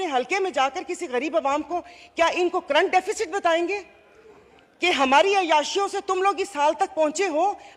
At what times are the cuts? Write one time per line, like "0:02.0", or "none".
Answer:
none